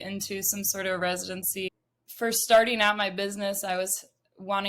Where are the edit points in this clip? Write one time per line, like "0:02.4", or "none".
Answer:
0:01.7